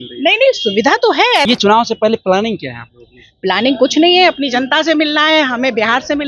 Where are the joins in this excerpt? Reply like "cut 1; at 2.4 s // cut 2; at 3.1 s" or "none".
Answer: cut 1; at 1.5 s